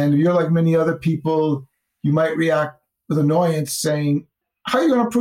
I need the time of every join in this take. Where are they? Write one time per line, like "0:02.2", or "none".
none